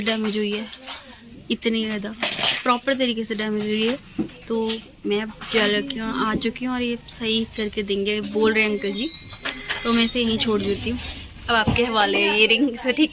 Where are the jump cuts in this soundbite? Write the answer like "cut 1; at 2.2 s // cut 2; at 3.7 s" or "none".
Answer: none